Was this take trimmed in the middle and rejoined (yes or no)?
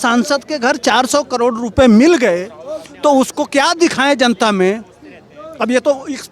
no